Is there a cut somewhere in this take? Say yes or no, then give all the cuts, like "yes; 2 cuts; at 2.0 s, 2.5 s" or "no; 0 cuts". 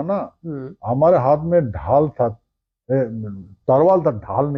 no; 0 cuts